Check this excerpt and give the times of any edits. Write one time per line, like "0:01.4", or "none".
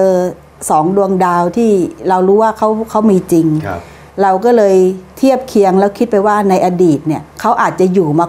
none